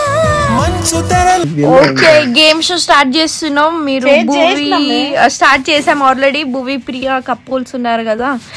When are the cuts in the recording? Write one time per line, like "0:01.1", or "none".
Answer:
0:01.5